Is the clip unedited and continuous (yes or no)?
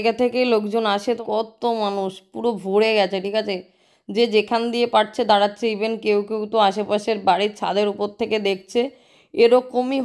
no